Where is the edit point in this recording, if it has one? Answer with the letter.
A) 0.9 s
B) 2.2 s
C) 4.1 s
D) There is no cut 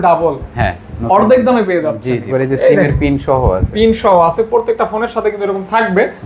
B